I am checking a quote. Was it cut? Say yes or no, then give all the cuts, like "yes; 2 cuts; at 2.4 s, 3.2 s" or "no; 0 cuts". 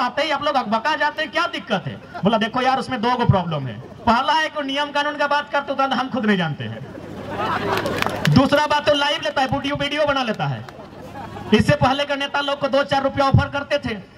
no; 0 cuts